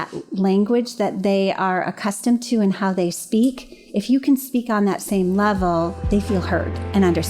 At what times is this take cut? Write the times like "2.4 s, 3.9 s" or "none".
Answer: 6.3 s